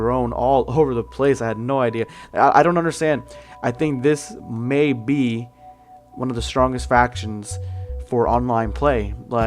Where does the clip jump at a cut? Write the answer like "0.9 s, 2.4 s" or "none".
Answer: 7.8 s